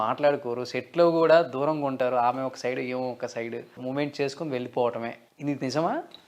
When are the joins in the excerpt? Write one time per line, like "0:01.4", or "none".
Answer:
0:03.8
0:05.2